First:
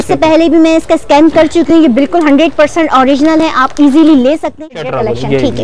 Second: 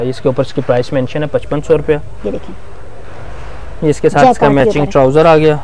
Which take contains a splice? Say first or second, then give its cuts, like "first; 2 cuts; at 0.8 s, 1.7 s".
first; 1 cut; at 4.5 s